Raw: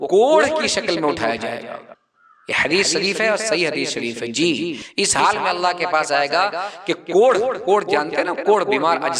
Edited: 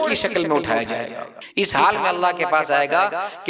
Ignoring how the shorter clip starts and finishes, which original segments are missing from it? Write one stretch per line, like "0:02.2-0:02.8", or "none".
0:01.9-0:04.8